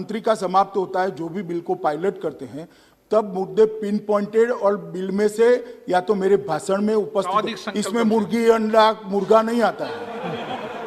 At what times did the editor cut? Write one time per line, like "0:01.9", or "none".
none